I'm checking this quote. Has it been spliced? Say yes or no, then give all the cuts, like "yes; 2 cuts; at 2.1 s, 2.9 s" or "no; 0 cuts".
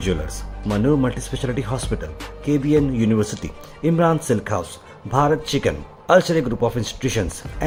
no; 0 cuts